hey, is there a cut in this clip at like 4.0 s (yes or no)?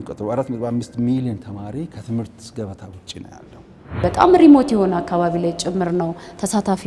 yes